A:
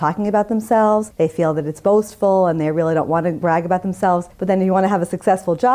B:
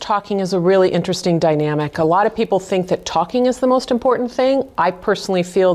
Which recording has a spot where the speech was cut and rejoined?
A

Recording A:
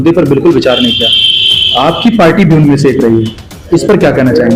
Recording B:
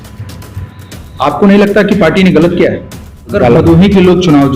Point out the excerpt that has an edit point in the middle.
B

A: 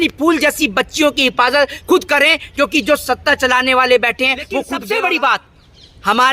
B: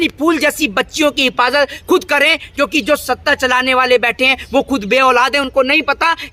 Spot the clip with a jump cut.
A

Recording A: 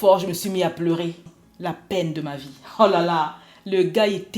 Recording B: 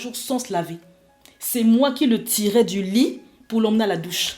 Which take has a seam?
A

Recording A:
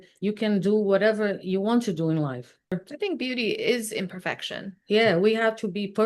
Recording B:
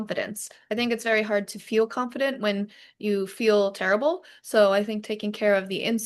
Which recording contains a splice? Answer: A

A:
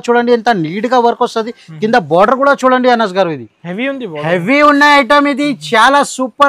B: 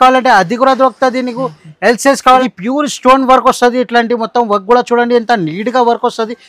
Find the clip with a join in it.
B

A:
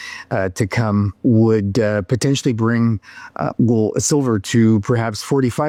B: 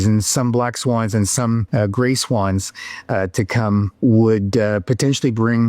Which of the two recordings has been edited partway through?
B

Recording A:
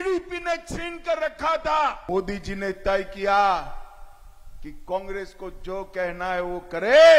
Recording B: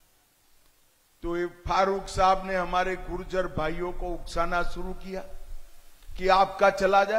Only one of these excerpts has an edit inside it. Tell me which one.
A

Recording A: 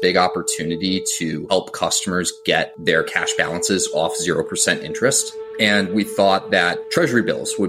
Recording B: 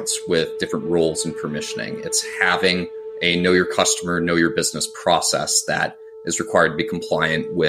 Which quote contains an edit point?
A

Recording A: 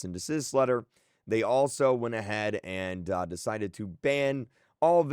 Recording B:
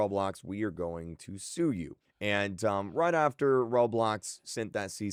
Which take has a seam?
A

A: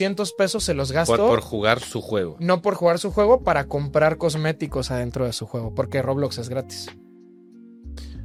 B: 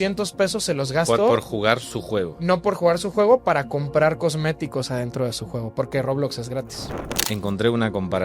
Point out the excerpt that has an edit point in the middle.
B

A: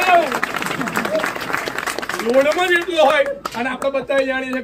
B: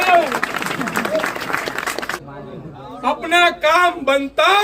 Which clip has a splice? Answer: B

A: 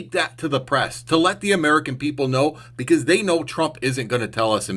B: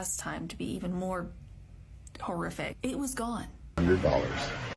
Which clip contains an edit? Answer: B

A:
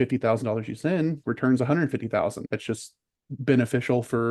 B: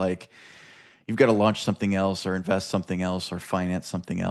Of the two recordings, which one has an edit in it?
A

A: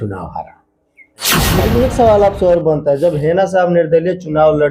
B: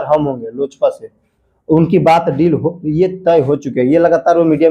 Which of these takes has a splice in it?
A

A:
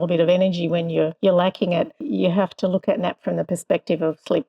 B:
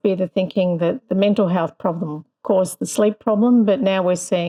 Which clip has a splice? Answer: A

